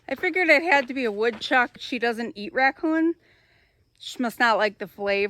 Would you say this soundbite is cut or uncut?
cut